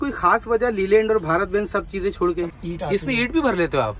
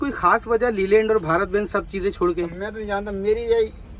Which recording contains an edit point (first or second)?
first